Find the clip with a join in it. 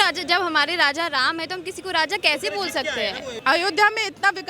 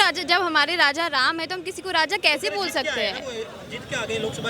first; 1 cut; at 3.3 s

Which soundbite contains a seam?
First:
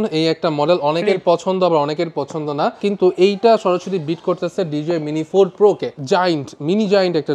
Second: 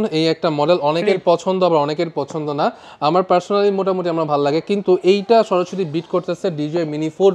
first; 2 cuts; at 2.8 s, 5.9 s

